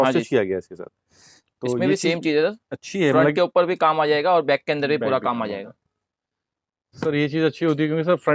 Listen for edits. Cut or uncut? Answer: uncut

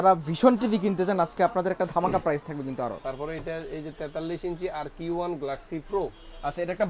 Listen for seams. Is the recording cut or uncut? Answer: cut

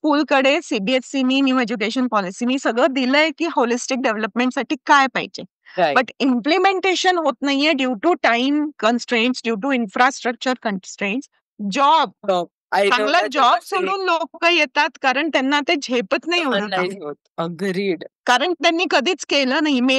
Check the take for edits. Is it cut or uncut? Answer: cut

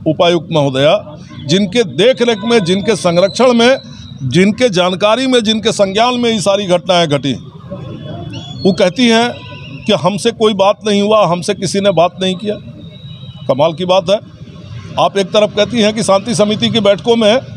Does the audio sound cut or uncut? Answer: uncut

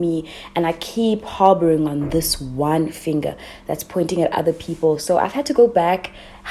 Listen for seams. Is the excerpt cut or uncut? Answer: uncut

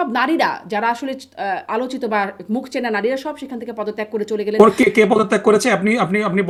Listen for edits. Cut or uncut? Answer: uncut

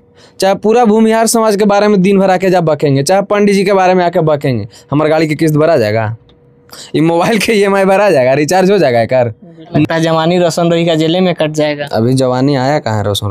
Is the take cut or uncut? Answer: cut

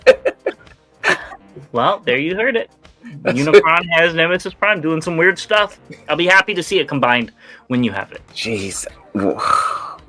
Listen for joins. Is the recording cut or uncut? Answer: cut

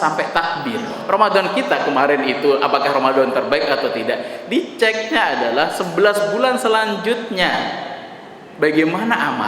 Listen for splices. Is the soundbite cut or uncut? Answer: cut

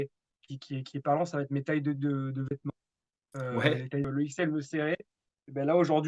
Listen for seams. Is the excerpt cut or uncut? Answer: cut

